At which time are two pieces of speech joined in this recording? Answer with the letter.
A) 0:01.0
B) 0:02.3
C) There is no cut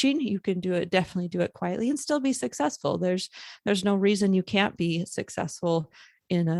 C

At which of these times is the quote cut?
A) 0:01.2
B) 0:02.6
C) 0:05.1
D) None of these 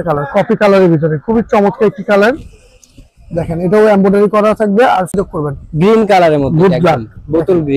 C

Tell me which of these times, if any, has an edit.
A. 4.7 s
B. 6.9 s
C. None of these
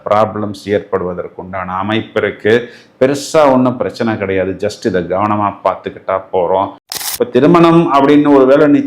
B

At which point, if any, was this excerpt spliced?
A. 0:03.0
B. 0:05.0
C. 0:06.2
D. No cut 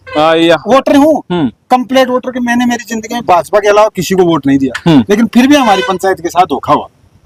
D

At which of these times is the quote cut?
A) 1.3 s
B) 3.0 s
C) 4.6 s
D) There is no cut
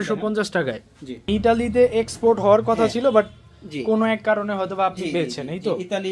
A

